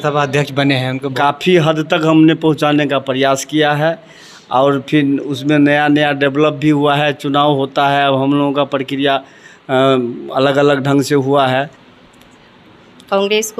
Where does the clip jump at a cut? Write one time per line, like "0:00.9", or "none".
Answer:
0:01.0
0:11.5

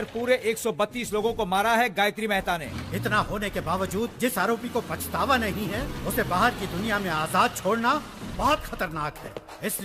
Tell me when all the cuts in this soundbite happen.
0:02.6

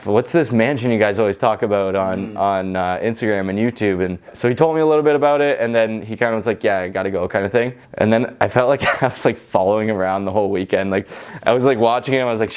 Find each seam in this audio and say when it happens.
0:04.3
0:07.8

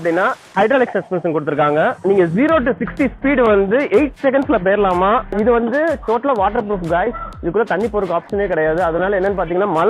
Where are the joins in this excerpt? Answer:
0:02.0

